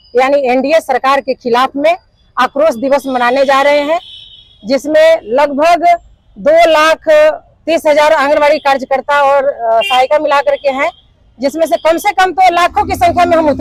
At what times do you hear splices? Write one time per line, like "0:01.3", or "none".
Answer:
none